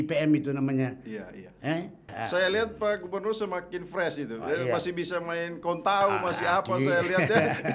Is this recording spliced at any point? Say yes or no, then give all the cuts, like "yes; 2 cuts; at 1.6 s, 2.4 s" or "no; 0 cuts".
yes; 1 cut; at 2.1 s